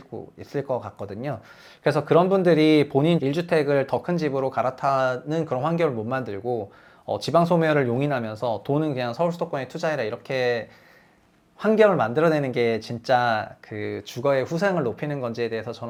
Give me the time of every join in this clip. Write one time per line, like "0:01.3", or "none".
none